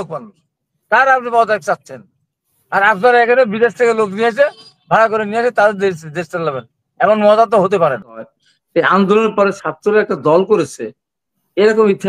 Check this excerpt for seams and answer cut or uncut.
cut